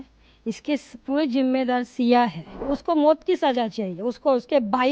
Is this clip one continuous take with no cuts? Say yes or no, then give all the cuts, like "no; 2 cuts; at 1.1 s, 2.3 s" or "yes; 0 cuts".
no; 1 cut; at 2.6 s